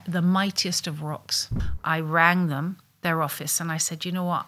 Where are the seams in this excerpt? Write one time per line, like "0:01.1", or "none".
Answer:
0:01.6